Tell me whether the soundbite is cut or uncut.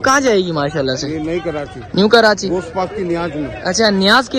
uncut